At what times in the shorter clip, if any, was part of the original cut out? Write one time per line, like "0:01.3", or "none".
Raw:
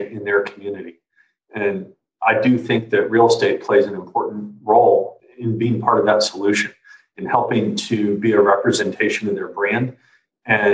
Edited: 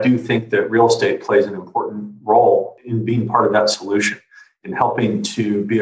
0:02.8